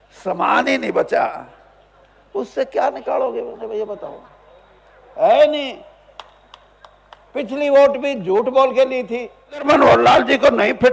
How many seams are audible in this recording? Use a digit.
1